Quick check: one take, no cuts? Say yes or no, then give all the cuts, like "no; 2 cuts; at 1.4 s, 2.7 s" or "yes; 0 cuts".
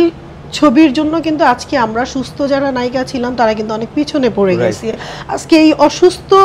yes; 0 cuts